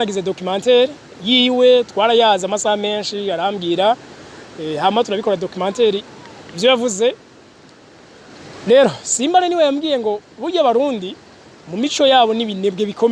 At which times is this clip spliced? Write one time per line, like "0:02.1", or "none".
none